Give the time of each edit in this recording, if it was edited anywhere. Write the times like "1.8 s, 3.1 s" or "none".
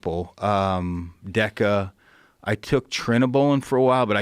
1.0 s